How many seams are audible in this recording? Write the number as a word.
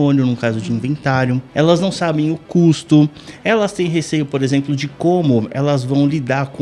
one